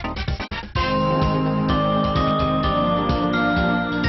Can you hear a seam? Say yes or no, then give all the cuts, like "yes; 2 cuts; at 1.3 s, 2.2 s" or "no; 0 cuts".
no; 0 cuts